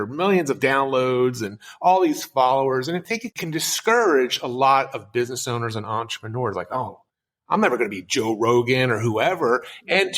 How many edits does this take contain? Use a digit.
1